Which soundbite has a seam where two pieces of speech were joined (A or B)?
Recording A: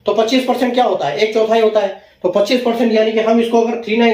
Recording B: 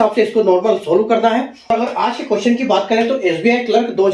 B